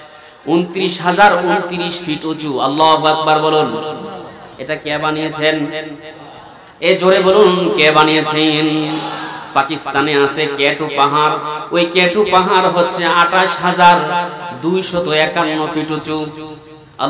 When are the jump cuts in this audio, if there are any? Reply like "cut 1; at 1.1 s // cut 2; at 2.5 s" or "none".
none